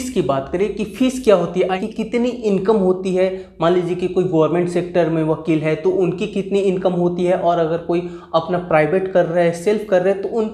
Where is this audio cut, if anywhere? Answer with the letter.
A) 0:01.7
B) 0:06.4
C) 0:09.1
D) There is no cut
A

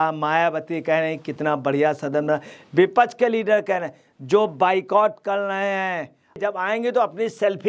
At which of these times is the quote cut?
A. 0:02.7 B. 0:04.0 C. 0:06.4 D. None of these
C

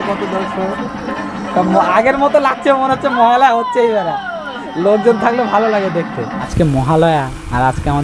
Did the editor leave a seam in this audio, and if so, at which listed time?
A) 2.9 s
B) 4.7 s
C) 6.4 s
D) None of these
C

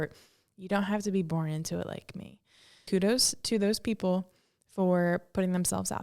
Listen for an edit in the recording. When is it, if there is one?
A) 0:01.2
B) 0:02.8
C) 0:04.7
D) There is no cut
B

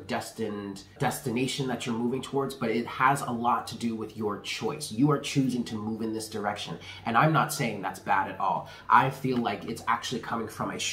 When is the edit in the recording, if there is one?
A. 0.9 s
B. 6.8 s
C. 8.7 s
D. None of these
A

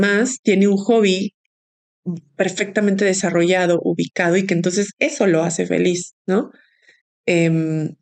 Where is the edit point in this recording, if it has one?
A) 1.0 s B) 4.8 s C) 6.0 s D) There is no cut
D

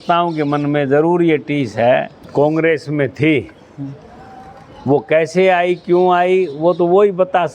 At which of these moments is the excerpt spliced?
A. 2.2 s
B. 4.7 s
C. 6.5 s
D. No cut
A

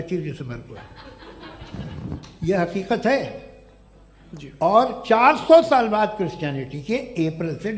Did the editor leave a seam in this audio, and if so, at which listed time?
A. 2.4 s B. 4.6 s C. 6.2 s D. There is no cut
D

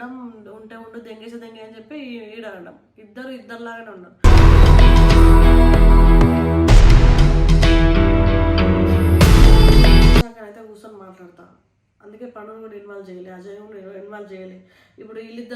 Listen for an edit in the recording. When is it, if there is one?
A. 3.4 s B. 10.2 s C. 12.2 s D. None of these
B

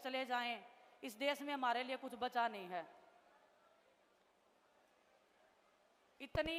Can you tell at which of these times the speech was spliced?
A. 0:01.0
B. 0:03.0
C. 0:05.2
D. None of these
D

